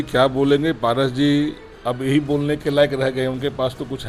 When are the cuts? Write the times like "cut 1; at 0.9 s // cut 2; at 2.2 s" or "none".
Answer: none